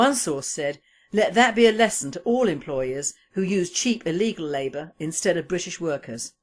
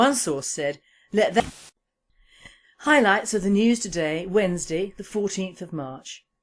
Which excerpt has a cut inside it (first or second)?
first